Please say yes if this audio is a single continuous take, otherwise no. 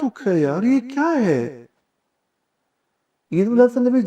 yes